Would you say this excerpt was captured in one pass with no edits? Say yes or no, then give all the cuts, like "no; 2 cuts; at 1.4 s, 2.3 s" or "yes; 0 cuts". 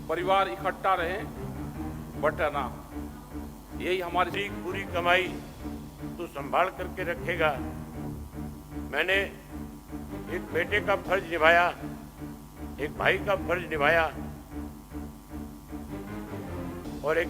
no; 1 cut; at 4.3 s